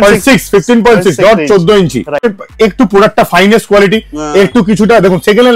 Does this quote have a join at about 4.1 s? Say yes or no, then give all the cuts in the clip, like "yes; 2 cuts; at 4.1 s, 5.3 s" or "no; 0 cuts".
no; 1 cut; at 2.3 s